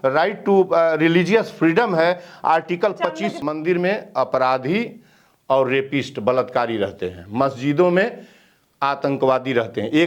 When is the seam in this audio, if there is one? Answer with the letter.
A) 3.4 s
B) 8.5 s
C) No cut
A